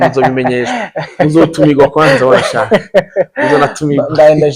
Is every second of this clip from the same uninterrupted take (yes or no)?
yes